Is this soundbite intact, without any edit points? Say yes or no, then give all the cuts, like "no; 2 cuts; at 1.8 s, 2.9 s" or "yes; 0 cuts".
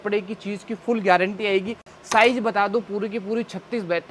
yes; 0 cuts